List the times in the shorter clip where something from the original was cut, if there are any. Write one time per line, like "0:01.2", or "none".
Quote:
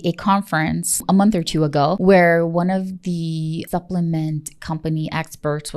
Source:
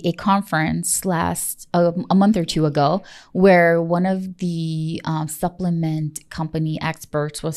0:01.0
0:02.0
0:03.6